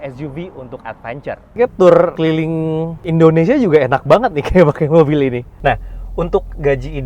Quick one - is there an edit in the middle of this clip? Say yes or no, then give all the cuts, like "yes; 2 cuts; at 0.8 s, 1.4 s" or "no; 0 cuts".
yes; 3 cuts; at 1.6 s, 2.6 s, 5.5 s